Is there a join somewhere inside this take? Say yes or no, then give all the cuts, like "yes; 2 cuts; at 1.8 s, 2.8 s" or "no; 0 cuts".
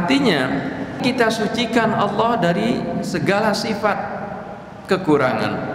yes; 1 cut; at 1.0 s